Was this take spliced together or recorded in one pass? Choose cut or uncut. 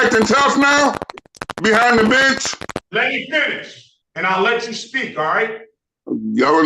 cut